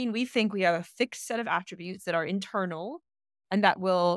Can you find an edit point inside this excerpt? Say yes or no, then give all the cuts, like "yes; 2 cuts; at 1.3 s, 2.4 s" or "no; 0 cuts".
no; 0 cuts